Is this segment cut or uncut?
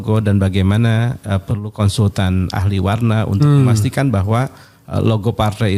uncut